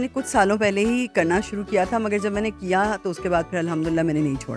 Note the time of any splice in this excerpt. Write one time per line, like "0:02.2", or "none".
none

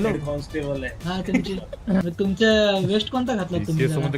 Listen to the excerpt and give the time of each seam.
0:02.0

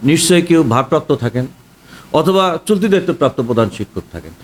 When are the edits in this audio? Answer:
none

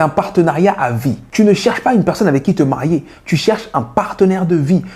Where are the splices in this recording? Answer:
0:01.2

